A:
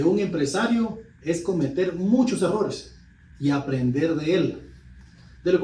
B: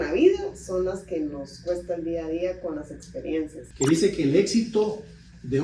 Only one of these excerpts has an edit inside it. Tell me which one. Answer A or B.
B